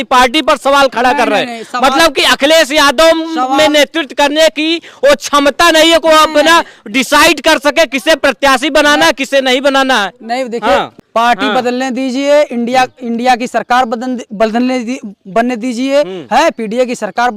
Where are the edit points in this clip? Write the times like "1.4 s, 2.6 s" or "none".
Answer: 11.0 s

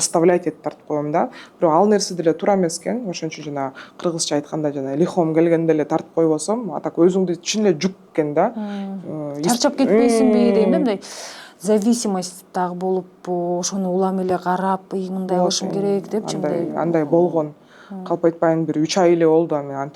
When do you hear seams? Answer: none

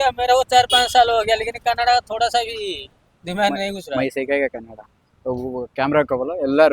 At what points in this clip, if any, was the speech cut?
4.6 s

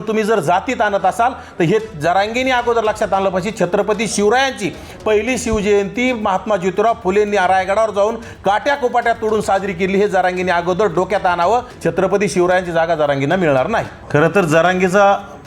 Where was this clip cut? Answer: 11.7 s, 14.0 s

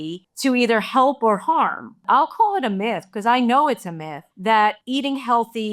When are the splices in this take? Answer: 2.0 s, 4.8 s

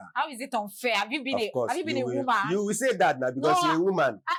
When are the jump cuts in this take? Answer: none

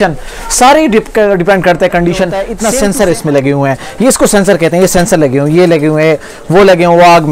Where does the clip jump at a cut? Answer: 2.5 s

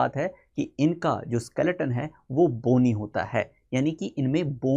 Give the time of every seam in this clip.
none

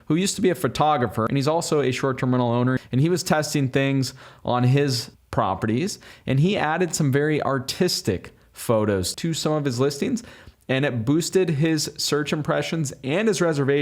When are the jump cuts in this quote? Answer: 1.3 s, 2.8 s, 9.1 s

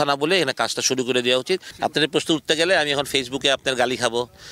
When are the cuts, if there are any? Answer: 1.7 s

